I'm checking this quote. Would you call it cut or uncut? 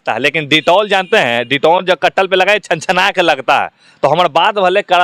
uncut